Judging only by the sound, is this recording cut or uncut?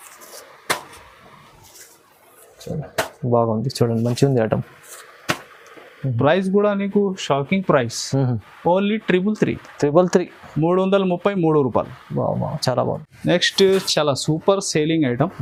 uncut